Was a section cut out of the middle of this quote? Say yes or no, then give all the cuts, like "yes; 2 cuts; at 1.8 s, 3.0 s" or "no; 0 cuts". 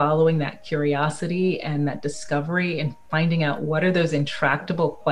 no; 0 cuts